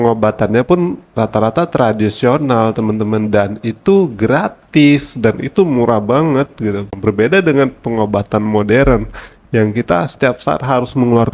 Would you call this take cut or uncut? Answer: cut